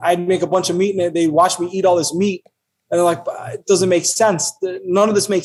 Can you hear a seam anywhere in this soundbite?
no; 0 cuts

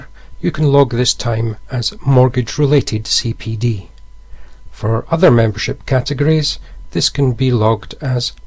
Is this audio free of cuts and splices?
no; 1 cut; at 1.3 s

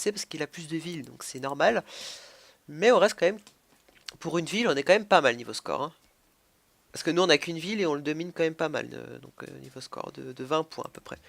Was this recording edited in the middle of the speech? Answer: no; 0 cuts

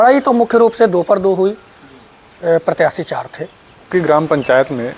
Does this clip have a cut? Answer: yes; 1 cut; at 3.9 s

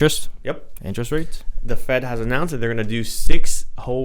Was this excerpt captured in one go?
yes; 0 cuts

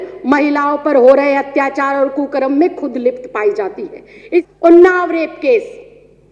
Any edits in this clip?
yes; 1 cut; at 4.4 s

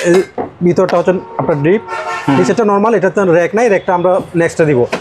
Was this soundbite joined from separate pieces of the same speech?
no; 0 cuts

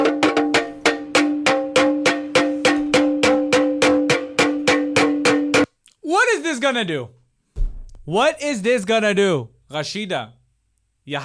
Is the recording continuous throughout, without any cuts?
yes; 0 cuts

